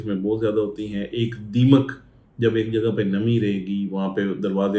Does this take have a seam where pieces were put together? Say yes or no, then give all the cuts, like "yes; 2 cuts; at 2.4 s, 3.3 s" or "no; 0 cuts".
no; 0 cuts